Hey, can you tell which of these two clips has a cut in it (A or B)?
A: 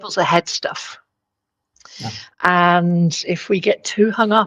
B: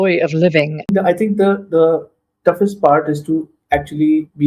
B